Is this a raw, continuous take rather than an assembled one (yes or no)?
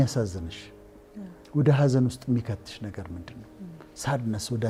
yes